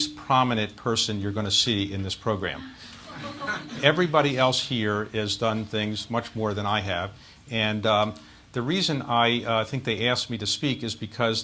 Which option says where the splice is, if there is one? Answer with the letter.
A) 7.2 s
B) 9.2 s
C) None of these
B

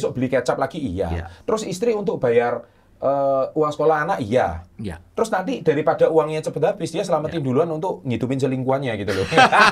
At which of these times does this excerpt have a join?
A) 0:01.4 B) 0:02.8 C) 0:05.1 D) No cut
D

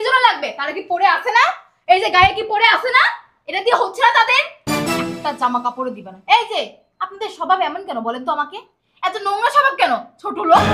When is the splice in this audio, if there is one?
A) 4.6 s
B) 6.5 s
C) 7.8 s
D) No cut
D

